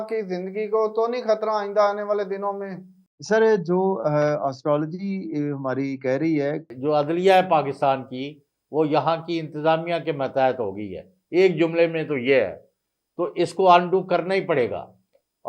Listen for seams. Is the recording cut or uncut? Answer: cut